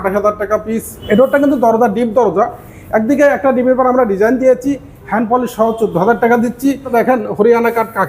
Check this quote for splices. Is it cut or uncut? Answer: cut